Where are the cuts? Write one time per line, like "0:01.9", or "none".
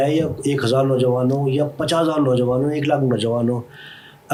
none